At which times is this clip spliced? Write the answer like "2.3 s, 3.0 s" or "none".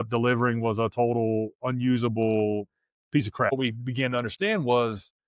3.5 s

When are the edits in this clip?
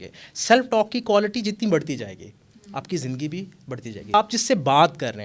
4.1 s

